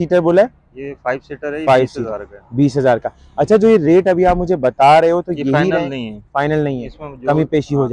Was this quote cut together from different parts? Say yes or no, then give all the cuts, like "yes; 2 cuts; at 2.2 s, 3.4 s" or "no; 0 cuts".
no; 0 cuts